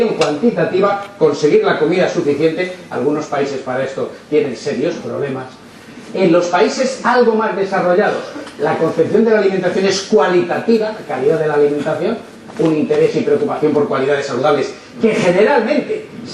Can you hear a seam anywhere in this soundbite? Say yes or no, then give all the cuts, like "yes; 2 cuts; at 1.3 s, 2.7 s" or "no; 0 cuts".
no; 0 cuts